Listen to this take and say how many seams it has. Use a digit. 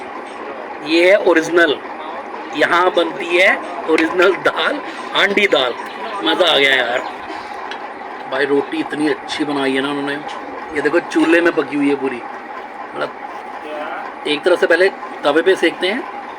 1